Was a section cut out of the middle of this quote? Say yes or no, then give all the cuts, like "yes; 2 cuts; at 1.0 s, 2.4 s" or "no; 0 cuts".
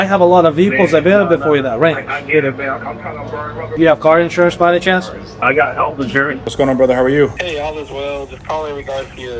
yes; 3 cuts; at 3.7 s, 6.5 s, 7.4 s